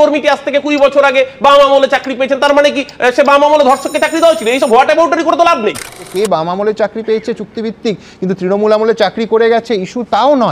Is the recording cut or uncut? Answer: uncut